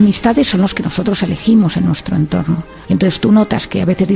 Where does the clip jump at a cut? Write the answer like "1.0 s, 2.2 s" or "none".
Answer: 2.7 s